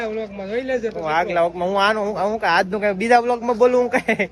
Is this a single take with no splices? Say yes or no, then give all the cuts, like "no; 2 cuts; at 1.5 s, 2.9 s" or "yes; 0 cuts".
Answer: yes; 0 cuts